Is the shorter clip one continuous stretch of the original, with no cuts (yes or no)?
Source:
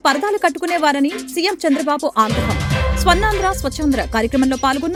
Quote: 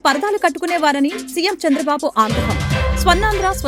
yes